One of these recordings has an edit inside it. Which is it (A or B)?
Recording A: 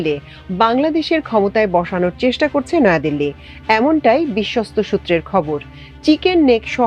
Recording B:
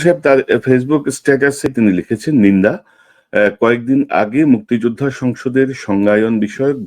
B